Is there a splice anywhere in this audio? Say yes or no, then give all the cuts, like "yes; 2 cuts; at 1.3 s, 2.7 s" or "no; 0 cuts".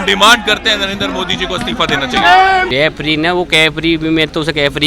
yes; 1 cut; at 2.7 s